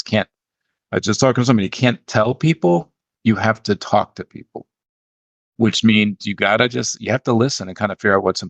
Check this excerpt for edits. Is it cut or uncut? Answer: uncut